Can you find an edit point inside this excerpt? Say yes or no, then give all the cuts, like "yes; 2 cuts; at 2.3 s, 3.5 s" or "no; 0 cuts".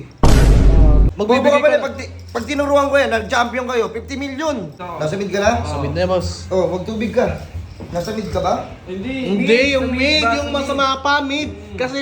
yes; 2 cuts; at 1.1 s, 4.8 s